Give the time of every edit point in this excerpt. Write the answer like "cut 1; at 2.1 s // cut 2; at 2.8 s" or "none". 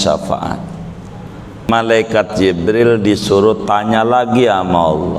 cut 1; at 1.7 s

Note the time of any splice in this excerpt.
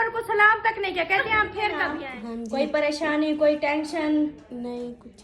cut 1; at 1.9 s

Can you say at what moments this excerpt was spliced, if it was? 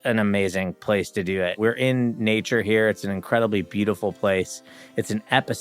cut 1; at 1.6 s

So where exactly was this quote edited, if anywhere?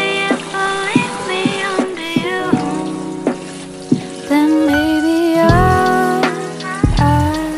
none

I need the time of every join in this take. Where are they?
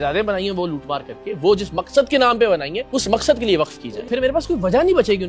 cut 1; at 2.8 s // cut 2; at 3.9 s

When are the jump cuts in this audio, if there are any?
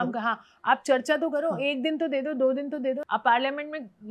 cut 1; at 3.0 s

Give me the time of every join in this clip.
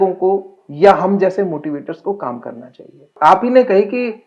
cut 1; at 3.1 s

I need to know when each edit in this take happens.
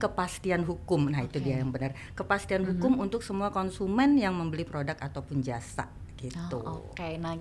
none

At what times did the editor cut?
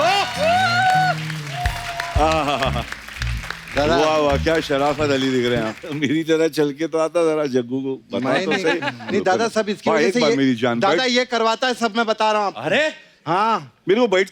cut 1; at 5.9 s

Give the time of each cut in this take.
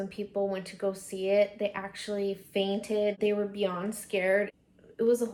none

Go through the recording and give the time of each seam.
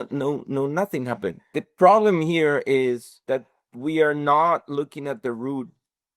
cut 1; at 1.6 s // cut 2; at 3.1 s

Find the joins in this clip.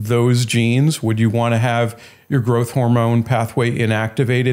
none

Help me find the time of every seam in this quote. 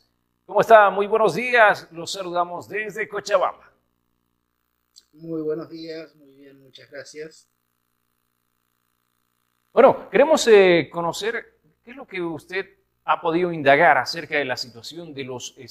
none

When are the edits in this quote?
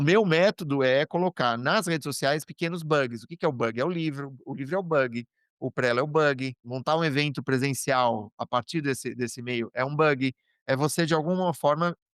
cut 1; at 6.7 s

